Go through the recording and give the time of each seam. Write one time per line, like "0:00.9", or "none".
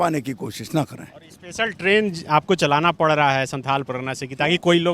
none

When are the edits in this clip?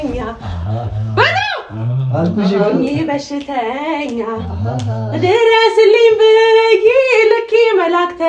none

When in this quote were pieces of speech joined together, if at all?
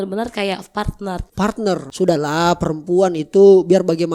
0:01.9

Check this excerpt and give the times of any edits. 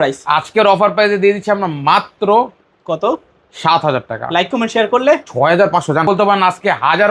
0:06.1

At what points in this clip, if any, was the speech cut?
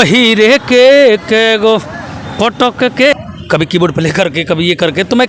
0:03.1

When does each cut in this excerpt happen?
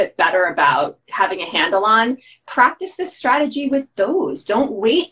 0:01.0

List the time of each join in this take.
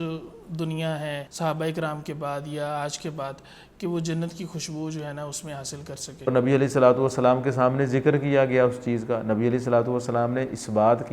0:01.3
0:06.3

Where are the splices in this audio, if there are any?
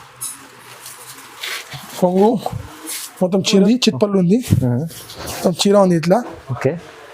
0:03.6

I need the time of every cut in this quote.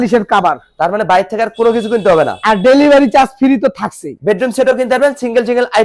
0:04.2

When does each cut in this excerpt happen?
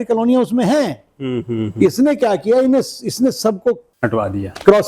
0:03.9

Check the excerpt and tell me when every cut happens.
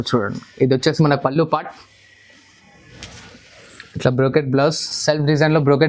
none

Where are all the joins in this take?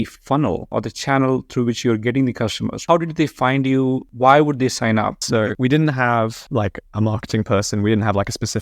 0:02.8
0:04.1
0:05.5

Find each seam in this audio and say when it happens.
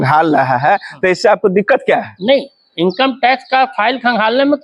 none

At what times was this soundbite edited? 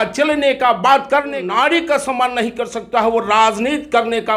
0:01.4

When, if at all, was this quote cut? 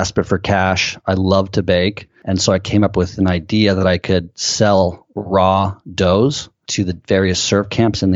none

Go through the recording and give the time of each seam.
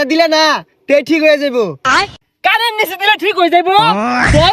0:02.1

